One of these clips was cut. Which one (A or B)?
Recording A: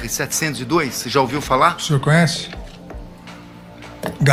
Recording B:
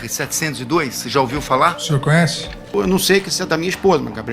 B